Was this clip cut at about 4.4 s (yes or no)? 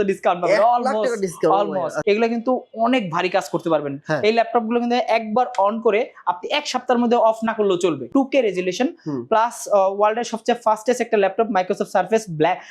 no